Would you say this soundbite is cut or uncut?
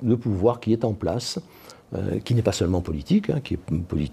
uncut